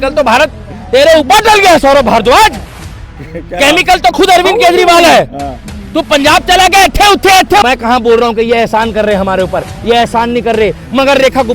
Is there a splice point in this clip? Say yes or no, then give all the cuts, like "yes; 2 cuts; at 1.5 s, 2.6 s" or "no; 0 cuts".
yes; 1 cut; at 7.6 s